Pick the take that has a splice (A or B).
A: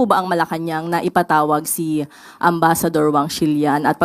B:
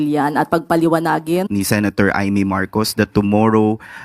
B